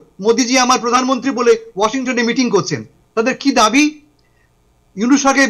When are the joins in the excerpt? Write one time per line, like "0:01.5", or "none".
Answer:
0:02.9